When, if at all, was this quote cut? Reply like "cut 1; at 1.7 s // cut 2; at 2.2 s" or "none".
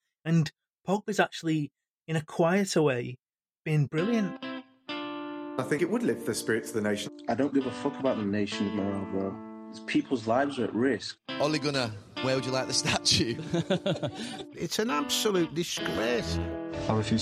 cut 1; at 4.5 s